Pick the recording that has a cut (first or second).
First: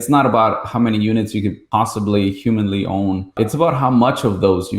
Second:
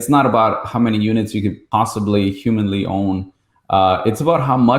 first